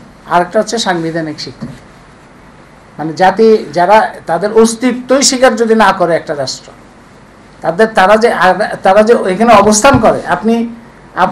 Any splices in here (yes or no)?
no